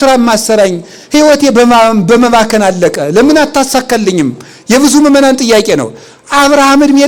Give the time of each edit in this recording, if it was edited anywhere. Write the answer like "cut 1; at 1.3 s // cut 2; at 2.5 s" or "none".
none